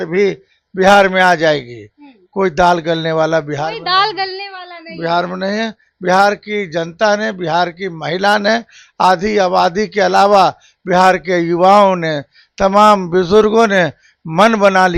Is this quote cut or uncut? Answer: uncut